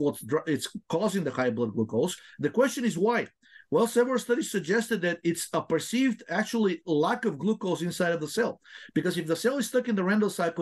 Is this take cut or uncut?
uncut